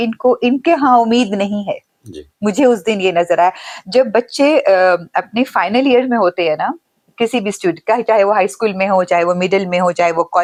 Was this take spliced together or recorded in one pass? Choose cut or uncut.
uncut